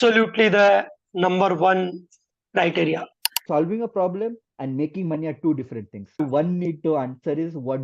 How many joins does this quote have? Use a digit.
2